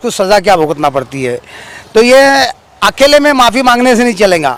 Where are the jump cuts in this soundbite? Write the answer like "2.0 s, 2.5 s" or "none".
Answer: none